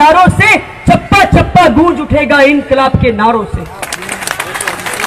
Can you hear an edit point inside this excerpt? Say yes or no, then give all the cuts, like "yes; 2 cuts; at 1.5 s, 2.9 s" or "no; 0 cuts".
no; 0 cuts